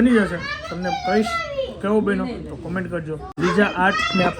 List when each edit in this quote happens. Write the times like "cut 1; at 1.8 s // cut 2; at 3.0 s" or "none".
cut 1; at 3.2 s